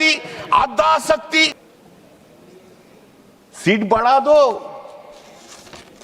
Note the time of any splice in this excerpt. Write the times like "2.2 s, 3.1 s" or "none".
1.6 s